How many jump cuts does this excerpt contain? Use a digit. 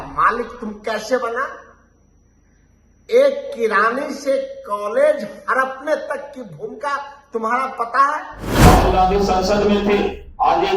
1